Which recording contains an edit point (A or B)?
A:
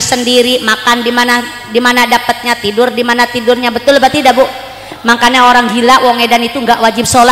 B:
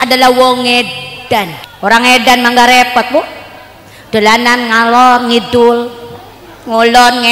B